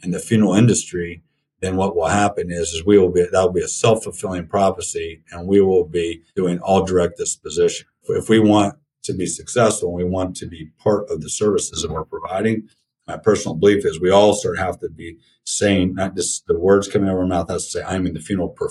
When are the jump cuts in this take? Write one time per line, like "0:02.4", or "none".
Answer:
0:06.2